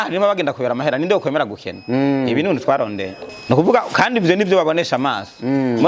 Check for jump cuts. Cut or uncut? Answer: cut